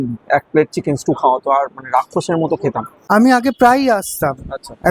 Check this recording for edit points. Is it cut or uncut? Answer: cut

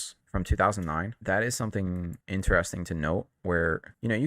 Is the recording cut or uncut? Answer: cut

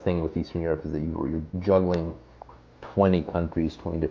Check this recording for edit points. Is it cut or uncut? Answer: uncut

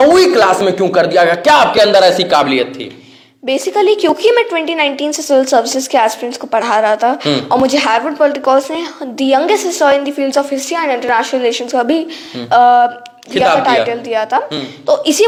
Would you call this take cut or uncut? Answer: uncut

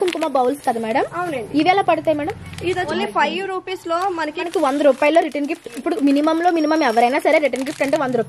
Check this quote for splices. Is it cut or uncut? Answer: cut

